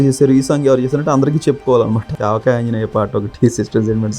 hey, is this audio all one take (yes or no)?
no